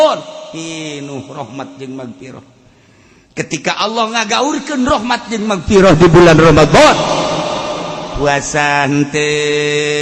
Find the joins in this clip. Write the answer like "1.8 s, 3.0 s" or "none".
none